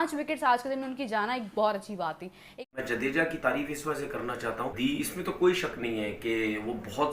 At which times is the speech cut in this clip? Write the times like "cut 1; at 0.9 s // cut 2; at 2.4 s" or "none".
cut 1; at 2.9 s